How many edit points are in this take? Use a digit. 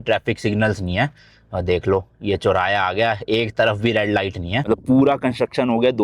1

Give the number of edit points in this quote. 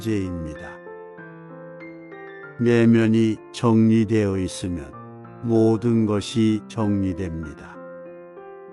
1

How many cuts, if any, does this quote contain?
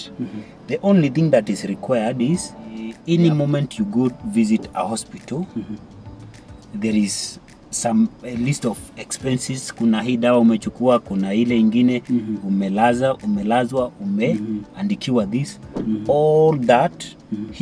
1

